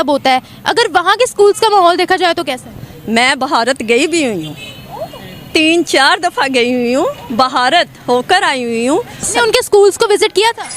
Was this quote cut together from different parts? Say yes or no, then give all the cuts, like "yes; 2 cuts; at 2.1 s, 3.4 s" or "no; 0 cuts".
yes; 1 cut; at 9.3 s